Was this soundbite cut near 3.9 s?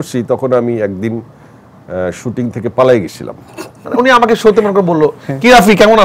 yes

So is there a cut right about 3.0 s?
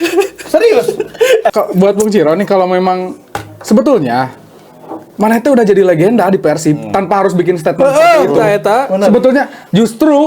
no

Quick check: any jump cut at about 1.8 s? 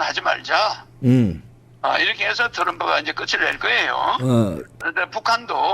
no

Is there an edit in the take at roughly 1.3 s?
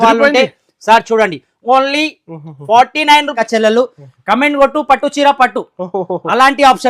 no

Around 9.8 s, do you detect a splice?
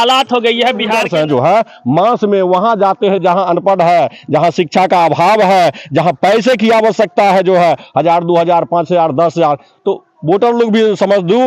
no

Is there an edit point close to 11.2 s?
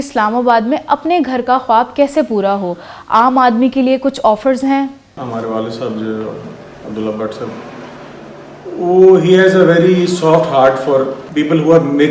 yes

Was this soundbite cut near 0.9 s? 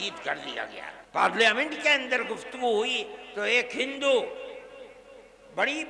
yes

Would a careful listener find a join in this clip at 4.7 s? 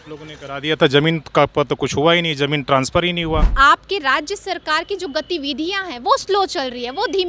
no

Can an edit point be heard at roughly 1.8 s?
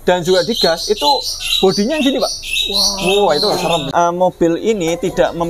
no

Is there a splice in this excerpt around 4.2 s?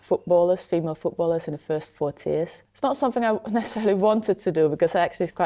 no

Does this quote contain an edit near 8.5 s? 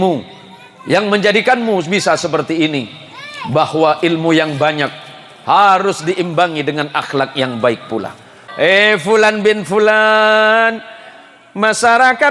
yes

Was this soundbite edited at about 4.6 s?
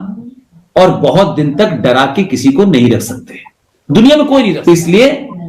yes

